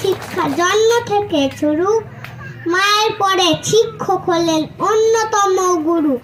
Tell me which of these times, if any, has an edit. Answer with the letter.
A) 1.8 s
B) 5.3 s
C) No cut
C